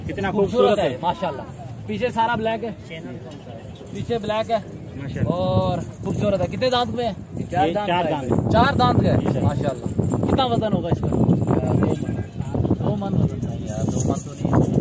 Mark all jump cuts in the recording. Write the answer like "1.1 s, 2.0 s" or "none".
none

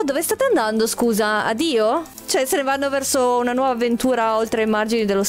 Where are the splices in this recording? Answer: 2.1 s

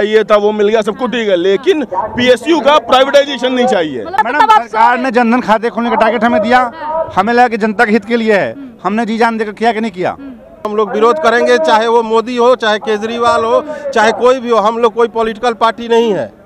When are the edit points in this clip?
4.2 s, 10.7 s

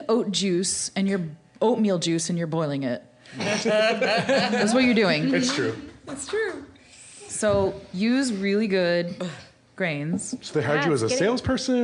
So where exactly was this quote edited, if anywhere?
none

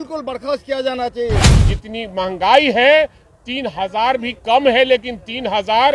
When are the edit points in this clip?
1.5 s

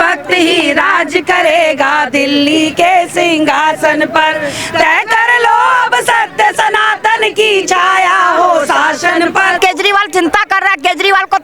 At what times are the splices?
9.6 s

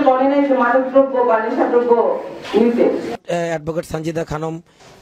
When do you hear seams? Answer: 3.2 s

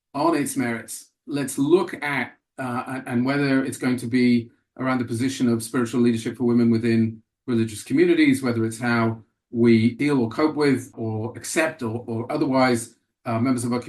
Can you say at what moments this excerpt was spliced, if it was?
10.0 s, 10.9 s

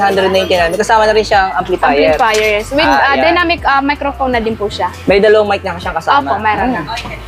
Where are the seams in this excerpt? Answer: none

